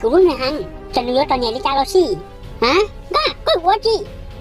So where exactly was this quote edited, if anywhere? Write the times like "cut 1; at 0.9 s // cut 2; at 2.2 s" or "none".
cut 1; at 2.3 s